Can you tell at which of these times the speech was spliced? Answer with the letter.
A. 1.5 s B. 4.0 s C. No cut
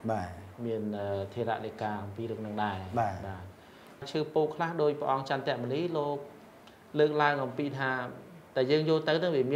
B